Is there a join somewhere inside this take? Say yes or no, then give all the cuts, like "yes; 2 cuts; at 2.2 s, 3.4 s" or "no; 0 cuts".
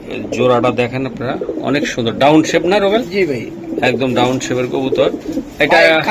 no; 0 cuts